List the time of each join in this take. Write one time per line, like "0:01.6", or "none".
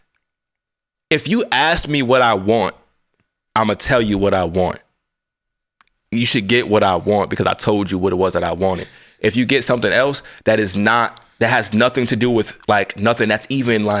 none